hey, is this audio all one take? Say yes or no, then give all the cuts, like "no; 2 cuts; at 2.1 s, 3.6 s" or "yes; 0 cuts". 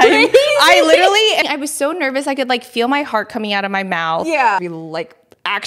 no; 2 cuts; at 1.4 s, 4.6 s